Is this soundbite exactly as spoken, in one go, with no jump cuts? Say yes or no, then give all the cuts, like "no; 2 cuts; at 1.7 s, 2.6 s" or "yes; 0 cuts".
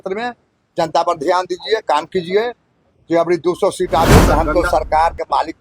no; 1 cut; at 4.2 s